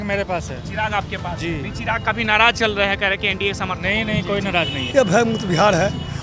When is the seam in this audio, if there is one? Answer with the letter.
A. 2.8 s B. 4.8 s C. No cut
B